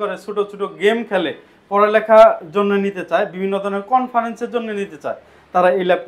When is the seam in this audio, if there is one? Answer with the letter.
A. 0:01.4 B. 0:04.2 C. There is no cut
C